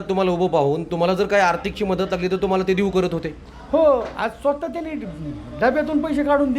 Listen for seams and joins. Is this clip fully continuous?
yes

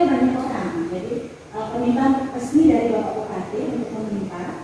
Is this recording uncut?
yes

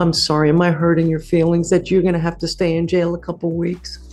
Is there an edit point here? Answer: no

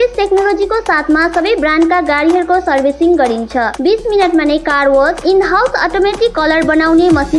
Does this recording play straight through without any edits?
yes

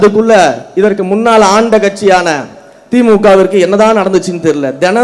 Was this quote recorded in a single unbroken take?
yes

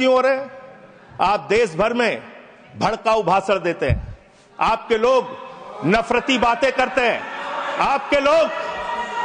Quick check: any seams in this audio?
no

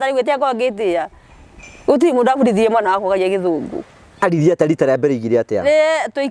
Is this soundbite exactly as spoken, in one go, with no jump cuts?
no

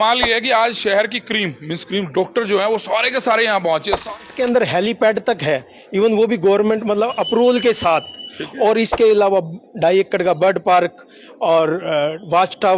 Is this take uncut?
no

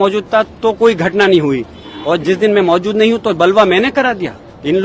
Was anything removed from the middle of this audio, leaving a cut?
no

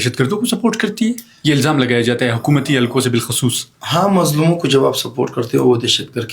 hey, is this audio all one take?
yes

